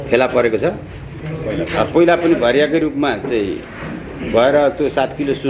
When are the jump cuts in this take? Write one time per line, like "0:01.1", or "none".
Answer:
0:01.2